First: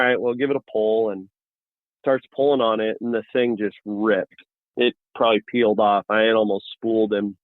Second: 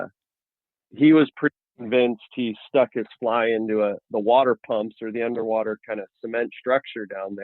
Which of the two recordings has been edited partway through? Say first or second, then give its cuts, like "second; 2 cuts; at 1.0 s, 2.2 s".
first; 1 cut; at 4.6 s